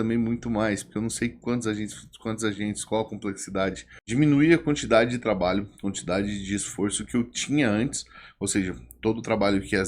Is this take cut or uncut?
cut